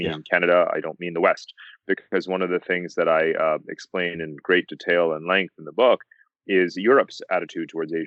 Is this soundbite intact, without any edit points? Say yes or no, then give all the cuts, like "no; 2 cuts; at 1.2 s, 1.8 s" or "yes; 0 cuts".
yes; 0 cuts